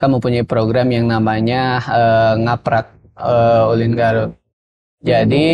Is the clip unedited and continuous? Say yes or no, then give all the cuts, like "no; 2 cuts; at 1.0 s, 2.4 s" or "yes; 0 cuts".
yes; 0 cuts